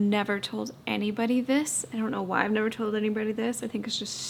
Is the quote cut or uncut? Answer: uncut